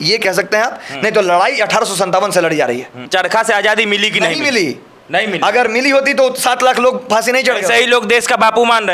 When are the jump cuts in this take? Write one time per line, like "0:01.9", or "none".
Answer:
0:03.0